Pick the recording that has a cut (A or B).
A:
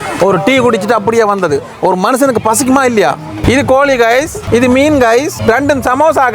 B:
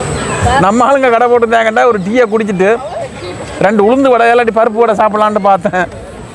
A